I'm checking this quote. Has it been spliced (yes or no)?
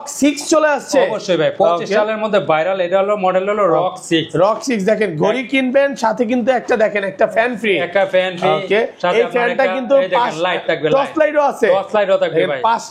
no